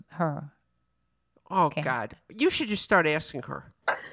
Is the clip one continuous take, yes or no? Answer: yes